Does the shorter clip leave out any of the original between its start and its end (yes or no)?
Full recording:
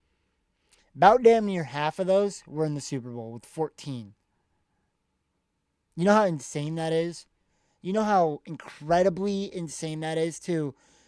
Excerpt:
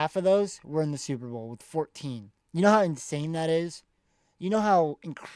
yes